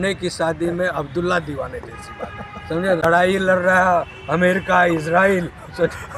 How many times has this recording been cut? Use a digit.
1